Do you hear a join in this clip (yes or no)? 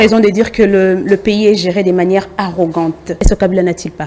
yes